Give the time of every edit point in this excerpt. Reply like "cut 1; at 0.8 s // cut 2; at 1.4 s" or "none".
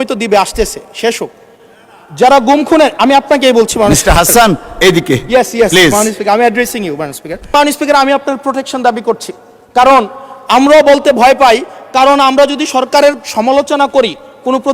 cut 1; at 7.5 s